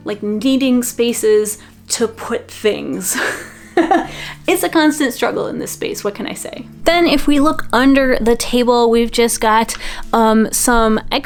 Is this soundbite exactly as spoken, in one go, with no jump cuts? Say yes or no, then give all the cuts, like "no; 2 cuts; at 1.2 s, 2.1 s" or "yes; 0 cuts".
yes; 0 cuts